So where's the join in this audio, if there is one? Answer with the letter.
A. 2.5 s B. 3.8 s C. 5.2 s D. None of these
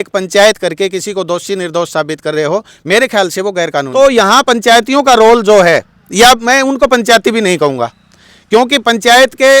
B